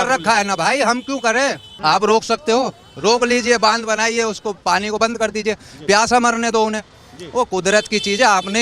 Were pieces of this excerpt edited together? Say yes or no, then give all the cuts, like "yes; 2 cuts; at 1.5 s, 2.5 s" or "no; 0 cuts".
yes; 1 cut; at 1.7 s